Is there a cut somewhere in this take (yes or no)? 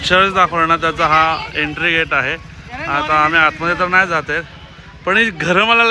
no